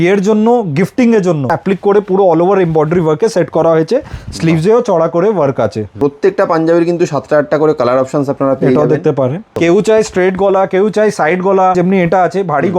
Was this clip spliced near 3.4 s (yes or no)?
no